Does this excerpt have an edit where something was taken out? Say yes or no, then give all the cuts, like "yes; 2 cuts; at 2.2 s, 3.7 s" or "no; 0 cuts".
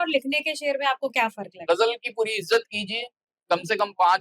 yes; 1 cut; at 1.5 s